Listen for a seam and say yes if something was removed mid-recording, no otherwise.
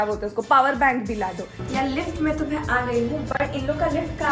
yes